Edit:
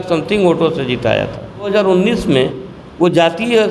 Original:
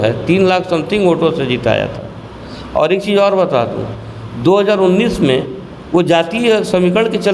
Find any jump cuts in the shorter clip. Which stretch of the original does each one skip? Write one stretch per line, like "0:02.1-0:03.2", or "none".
0:02.3-0:04.6